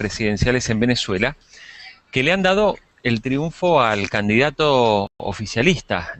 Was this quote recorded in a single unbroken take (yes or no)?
yes